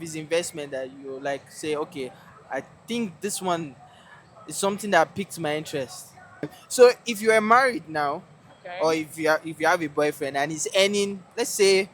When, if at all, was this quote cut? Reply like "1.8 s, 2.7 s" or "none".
6.6 s